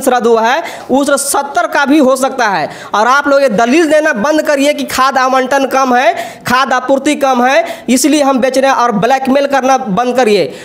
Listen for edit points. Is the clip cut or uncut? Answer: uncut